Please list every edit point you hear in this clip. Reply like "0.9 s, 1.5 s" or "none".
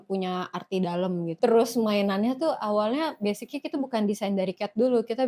1.3 s